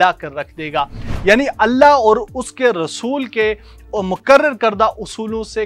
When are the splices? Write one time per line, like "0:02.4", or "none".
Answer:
0:01.1